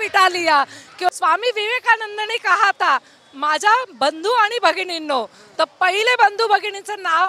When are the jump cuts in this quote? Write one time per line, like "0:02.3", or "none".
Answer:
0:01.1